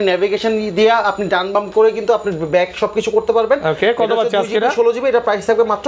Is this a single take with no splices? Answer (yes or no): yes